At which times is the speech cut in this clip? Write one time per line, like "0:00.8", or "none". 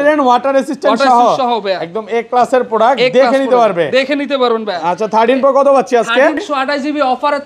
0:06.4